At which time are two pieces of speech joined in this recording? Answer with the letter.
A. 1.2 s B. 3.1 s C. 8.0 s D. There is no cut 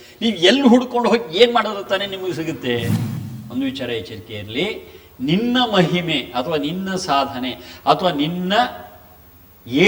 B